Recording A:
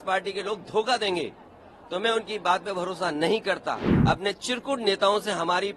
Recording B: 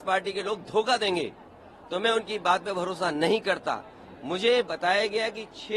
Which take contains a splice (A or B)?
A